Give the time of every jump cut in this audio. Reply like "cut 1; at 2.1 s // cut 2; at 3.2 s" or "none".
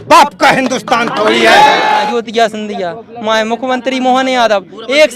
cut 1; at 2.0 s